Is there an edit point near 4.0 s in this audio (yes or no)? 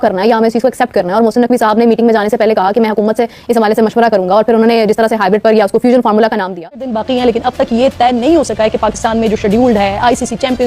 no